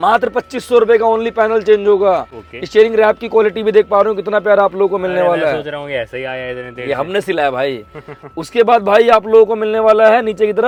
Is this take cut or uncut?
uncut